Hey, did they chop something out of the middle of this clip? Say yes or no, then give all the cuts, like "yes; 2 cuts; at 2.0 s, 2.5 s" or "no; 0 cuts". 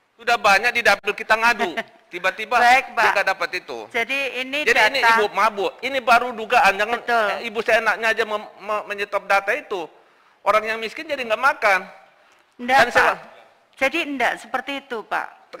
no; 0 cuts